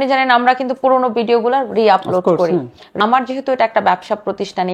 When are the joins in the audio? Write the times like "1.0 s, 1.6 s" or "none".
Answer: 2.9 s